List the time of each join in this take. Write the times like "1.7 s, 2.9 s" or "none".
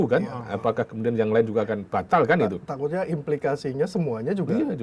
none